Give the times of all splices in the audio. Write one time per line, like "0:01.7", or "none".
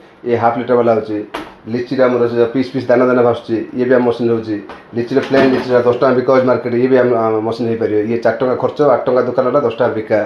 none